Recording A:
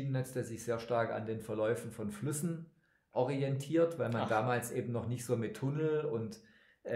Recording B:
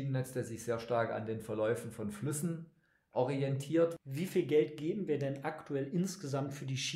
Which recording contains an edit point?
B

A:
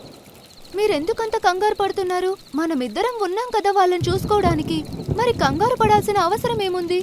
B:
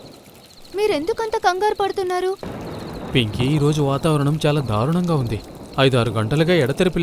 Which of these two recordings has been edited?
B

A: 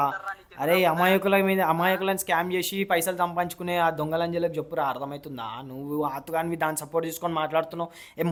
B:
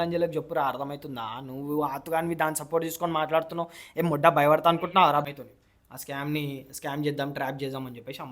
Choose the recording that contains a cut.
B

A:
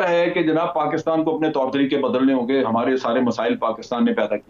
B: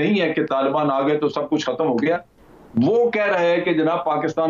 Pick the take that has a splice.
B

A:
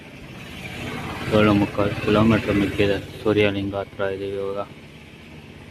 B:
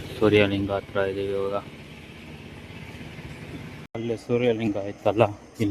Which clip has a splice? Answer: B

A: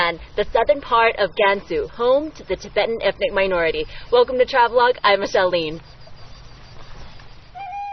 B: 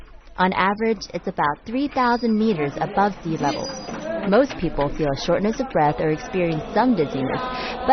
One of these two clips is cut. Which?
A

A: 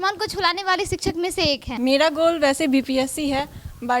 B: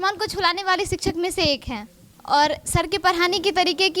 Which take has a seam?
A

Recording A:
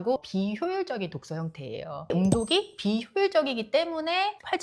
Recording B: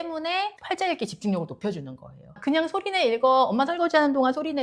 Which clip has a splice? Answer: B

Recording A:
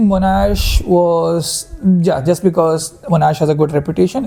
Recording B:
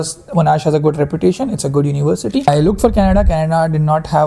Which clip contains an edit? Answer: B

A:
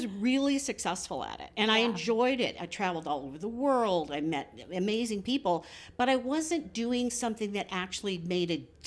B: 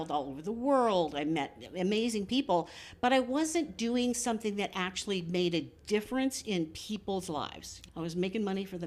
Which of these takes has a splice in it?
B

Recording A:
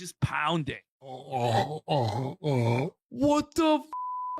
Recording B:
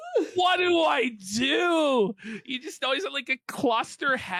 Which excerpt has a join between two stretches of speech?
A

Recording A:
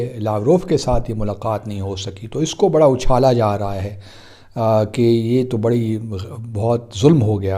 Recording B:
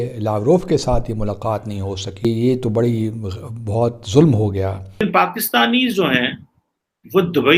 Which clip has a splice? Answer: B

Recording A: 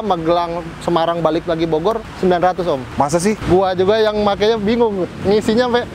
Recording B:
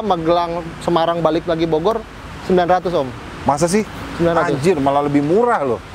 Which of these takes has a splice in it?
A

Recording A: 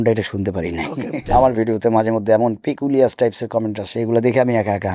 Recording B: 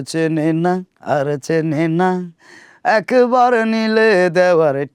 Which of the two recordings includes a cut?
A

